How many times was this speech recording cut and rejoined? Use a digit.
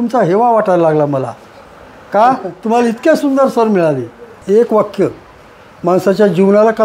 1